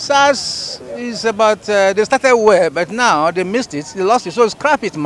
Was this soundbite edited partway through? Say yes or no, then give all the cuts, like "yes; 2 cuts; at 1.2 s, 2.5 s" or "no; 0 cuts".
no; 0 cuts